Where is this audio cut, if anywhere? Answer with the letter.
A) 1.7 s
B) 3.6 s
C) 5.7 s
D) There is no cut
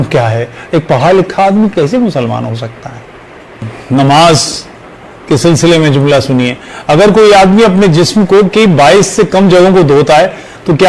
B